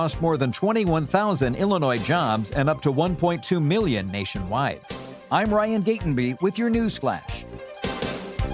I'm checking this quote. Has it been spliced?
yes; 2 cuts; at 5.1 s, 7.4 s

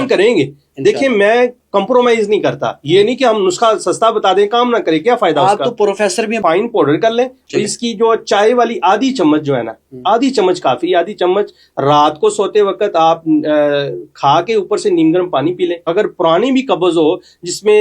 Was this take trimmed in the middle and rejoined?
yes; 2 cuts; at 6.4 s, 15.9 s

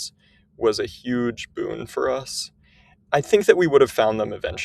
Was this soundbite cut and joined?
yes; 1 cut; at 3.0 s

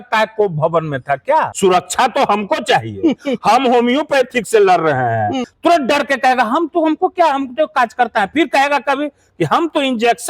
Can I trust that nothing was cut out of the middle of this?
no; 2 cuts; at 1.5 s, 5.5 s

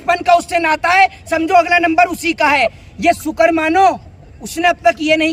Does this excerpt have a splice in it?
no; 0 cuts

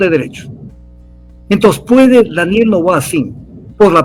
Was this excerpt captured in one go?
yes; 0 cuts

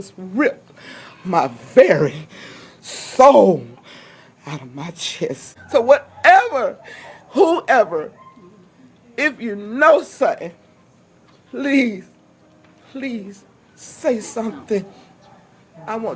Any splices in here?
no; 0 cuts

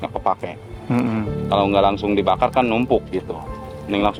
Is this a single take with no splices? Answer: yes; 0 cuts

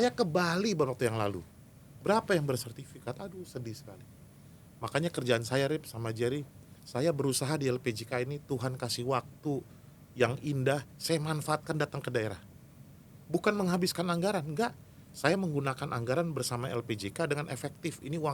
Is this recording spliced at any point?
no; 0 cuts

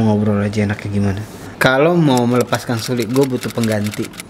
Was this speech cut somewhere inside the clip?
yes; 1 cut; at 1.4 s

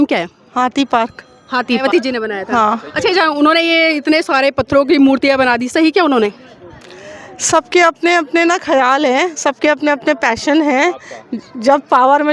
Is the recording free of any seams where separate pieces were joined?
no; 1 cut; at 1.8 s

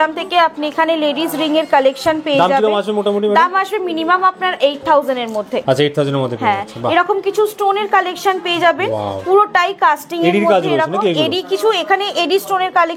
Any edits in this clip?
no; 0 cuts

